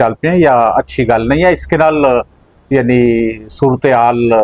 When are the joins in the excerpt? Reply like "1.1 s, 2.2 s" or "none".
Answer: none

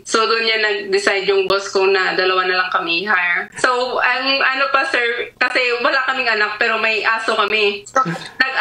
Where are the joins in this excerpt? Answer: 5.3 s, 7.8 s

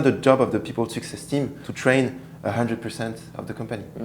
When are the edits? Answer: 1.6 s

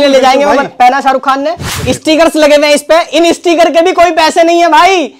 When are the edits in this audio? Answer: 1.7 s

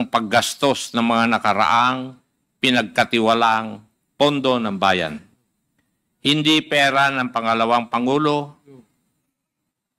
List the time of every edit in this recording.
none

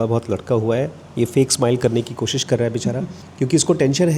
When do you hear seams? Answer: 3.2 s

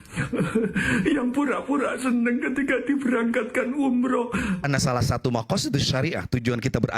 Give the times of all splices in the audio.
4.6 s

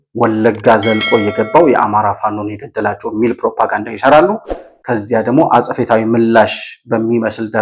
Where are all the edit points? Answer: none

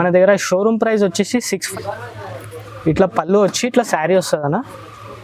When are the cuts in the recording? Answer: 1.7 s

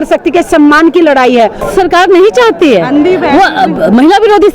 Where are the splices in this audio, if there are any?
1.7 s

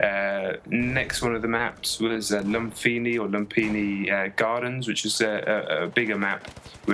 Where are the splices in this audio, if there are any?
5.3 s

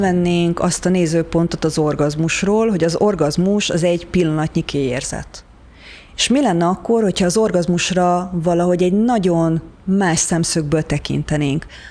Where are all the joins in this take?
none

